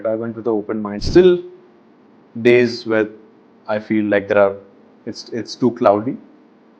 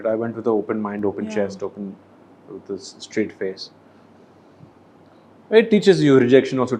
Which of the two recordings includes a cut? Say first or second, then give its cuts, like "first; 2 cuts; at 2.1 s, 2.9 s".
first; 1 cut; at 1.0 s